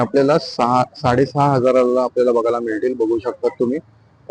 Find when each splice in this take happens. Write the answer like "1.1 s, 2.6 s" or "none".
none